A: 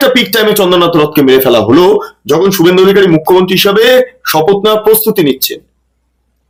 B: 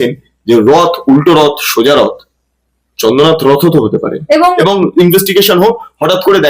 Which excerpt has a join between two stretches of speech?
B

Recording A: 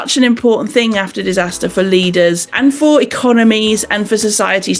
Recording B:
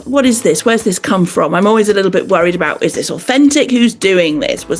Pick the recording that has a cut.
A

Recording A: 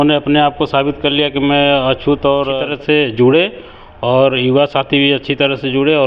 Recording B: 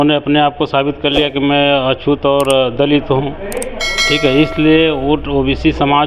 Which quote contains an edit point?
A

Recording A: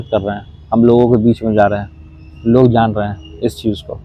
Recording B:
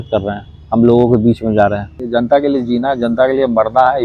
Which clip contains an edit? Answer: B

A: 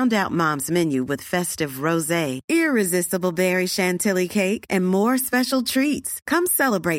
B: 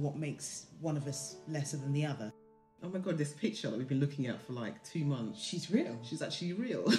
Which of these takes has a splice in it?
B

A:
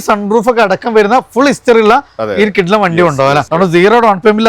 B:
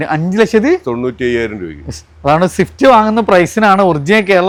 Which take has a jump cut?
A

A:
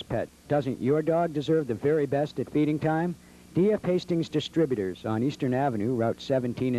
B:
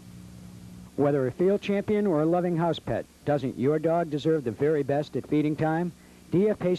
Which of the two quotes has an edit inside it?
B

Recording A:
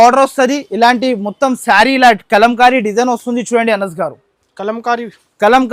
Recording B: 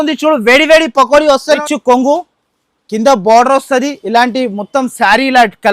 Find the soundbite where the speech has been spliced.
B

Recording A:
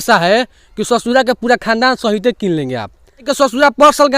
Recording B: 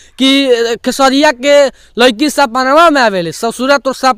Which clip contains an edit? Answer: A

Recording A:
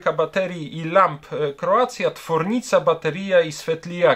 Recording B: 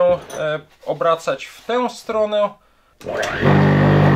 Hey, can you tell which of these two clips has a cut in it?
B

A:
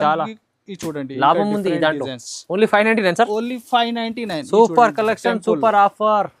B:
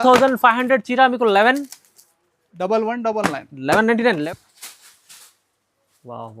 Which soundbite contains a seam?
B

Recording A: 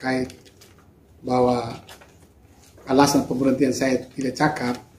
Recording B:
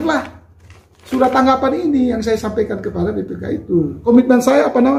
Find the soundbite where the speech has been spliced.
B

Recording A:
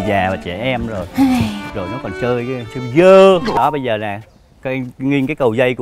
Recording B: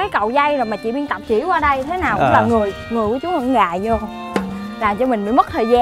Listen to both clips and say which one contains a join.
A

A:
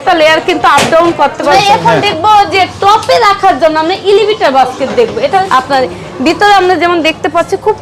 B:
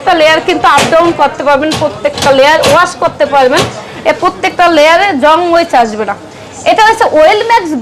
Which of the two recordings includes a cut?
A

